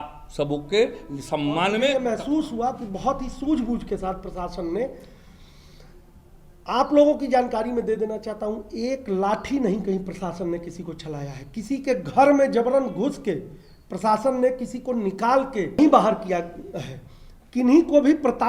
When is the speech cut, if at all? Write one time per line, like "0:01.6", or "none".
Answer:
0:01.9
0:15.8